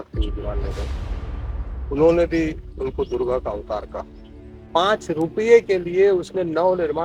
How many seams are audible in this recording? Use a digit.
1